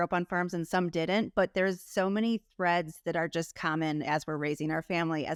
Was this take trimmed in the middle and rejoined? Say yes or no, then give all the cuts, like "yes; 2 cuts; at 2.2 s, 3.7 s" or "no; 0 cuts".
no; 0 cuts